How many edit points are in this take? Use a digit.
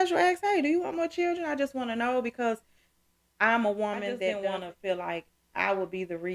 1